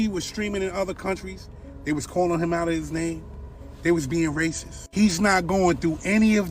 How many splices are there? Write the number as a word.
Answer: zero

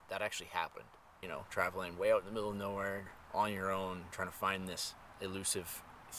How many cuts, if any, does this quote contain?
three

